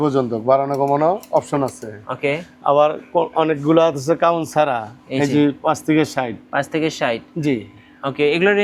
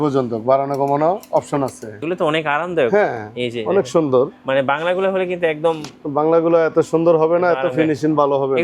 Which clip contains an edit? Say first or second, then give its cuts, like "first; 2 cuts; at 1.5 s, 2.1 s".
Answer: second; 1 cut; at 2.0 s